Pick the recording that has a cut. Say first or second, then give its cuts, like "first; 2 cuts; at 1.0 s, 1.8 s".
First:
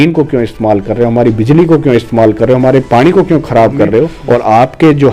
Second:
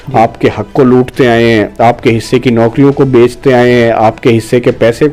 first; 1 cut; at 4.2 s